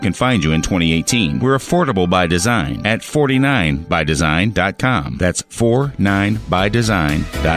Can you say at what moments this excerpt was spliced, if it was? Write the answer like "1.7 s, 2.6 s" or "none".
none